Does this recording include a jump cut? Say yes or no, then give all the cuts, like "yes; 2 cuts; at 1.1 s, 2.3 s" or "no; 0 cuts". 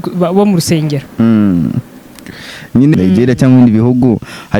yes; 1 cut; at 2.9 s